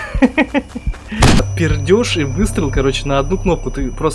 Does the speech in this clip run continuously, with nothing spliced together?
no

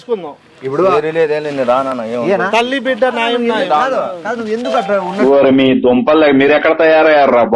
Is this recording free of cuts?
yes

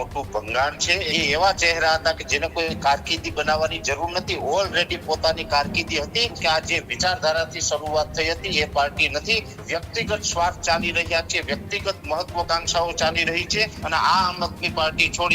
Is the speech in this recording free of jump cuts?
no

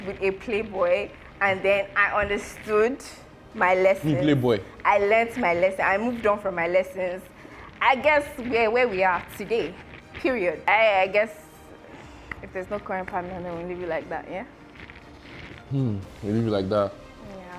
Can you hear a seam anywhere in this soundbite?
yes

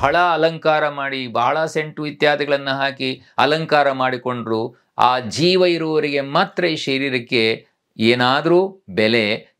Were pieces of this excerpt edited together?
no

